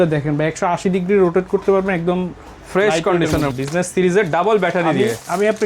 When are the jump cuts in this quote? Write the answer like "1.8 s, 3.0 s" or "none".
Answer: 3.5 s